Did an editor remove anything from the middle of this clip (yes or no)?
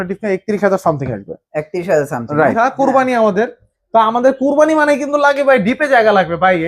yes